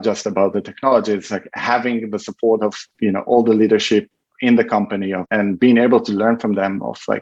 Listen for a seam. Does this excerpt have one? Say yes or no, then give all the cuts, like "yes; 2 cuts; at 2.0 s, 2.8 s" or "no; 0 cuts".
yes; 2 cuts; at 2.9 s, 5.3 s